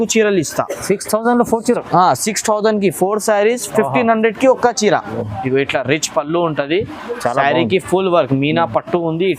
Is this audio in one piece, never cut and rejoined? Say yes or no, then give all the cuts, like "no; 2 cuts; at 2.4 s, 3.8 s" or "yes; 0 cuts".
no; 1 cut; at 5.2 s